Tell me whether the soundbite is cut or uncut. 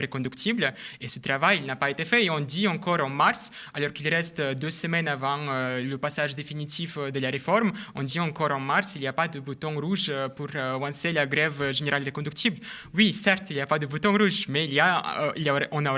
uncut